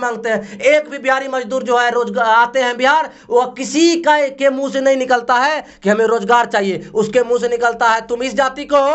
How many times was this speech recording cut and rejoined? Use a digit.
0